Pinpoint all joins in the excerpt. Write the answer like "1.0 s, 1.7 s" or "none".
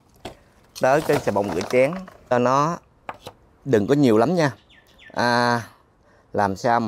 2.3 s